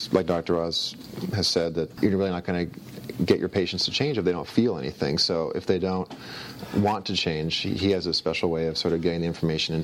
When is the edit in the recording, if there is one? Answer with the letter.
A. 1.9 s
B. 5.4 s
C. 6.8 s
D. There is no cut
A